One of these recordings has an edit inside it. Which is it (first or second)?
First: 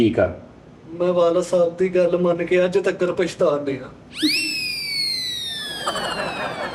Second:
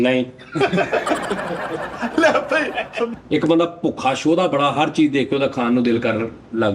second